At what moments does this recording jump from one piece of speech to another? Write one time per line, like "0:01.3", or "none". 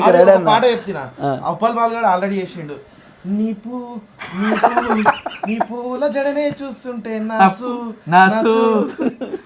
none